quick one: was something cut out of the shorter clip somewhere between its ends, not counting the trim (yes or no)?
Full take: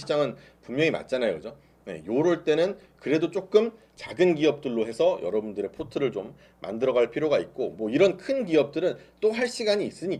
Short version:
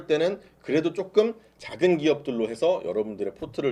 no